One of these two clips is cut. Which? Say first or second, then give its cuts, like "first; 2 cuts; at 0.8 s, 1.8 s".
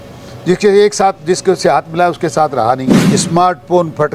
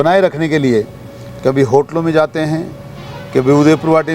first; 1 cut; at 3.0 s